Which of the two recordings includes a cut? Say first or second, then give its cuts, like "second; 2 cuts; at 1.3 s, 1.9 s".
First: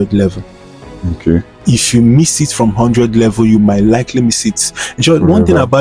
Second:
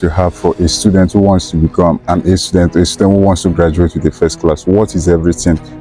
second; 1 cut; at 2.0 s